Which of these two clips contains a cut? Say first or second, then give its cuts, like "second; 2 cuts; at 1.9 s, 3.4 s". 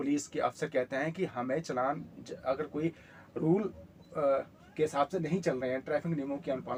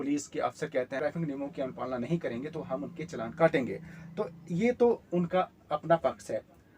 second; 1 cut; at 1.0 s